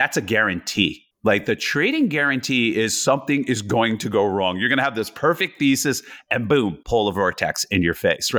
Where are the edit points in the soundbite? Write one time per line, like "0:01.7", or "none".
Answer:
0:01.1